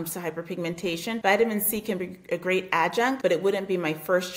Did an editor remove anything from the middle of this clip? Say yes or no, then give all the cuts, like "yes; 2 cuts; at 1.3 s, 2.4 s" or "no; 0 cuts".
yes; 2 cuts; at 1.2 s, 3.2 s